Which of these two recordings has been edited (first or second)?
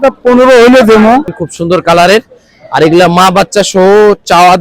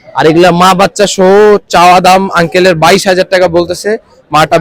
first